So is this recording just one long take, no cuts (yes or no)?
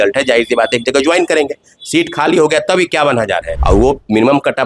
no